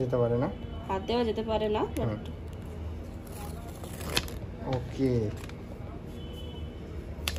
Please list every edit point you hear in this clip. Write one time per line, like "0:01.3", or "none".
none